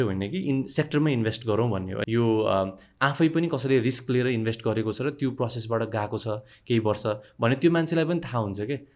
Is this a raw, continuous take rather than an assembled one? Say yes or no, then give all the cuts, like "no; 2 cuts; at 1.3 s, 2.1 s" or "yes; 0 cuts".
no; 1 cut; at 2.0 s